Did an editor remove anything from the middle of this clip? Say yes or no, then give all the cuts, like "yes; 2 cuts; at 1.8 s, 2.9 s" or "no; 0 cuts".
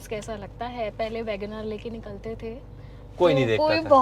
no; 0 cuts